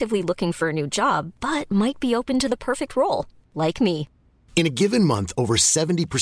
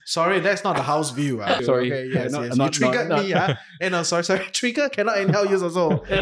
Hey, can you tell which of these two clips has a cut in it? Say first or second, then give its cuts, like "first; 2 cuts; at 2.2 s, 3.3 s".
second; 1 cut; at 1.6 s